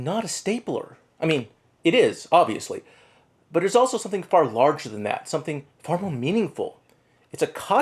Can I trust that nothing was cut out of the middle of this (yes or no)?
yes